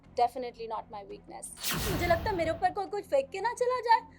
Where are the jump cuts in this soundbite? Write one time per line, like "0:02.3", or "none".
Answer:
0:01.9